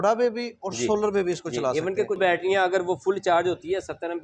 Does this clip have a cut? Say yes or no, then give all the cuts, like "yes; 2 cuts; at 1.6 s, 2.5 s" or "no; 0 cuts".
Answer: yes; 1 cut; at 2.2 s